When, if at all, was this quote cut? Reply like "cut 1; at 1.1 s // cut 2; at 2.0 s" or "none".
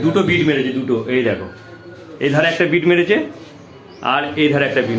none